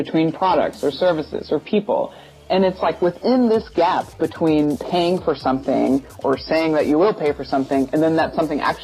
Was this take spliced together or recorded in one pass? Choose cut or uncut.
cut